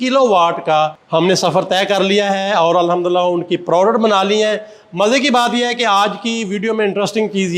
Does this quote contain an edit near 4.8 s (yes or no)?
no